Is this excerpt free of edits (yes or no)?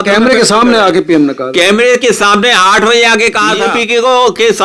no